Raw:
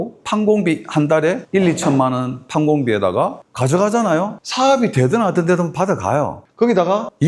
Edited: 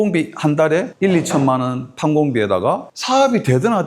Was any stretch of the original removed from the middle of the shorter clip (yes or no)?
yes